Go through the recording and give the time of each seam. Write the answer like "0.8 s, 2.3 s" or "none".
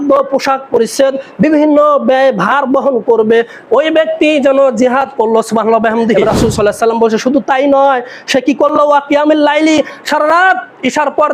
6.1 s